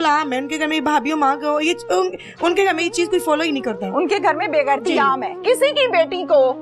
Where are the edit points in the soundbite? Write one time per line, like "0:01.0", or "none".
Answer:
0:05.4